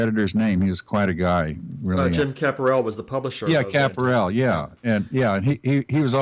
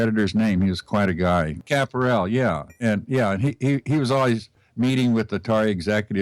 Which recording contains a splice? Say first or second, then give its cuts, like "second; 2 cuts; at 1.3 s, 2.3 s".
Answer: second; 1 cut; at 1.6 s